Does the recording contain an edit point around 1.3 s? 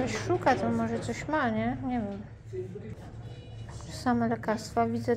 no; 1 cut; at 2.9 s

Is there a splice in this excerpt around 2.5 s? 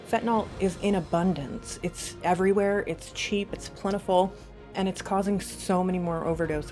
no; 1 cut; at 4.7 s

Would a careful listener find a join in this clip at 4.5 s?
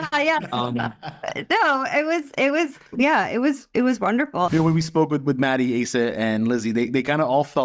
yes; 1 cut; at 4.5 s

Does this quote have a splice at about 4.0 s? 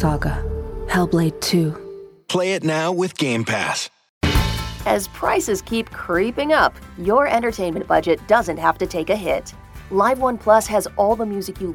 yes; 1 cut; at 4.0 s

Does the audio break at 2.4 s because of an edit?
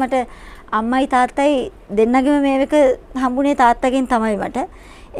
no; 0 cuts

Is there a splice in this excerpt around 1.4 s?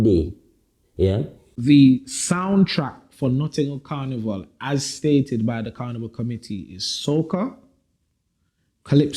yes; 1 cut; at 1.4 s

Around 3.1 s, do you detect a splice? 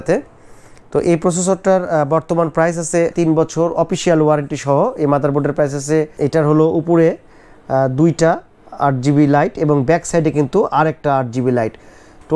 yes; 2 cuts; at 3.1 s, 6.1 s

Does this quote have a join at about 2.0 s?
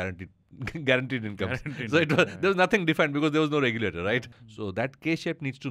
no; 1 cut; at 4.3 s

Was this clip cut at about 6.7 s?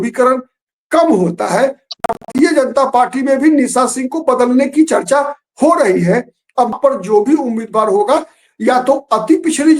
yes; 2 cuts; at 2.0 s, 6.7 s

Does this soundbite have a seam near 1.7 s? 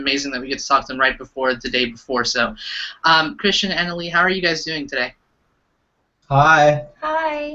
no; 1 cut; at 6.4 s

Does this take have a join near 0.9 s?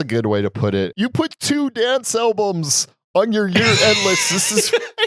yes; 1 cut; at 0.9 s

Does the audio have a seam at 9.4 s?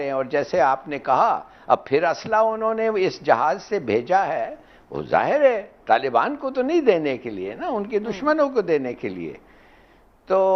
no; 0 cuts

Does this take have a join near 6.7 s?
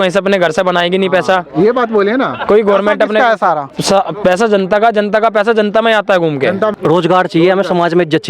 yes; 1 cut; at 6.7 s

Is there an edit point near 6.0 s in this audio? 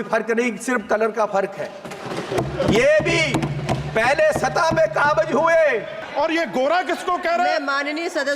yes; 1 cut; at 6.0 s

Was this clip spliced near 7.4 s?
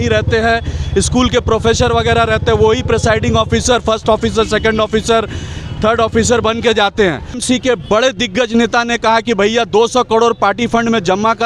yes; 1 cut; at 7.4 s

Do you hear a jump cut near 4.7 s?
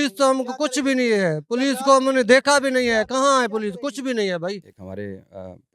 yes; 1 cut; at 4.7 s

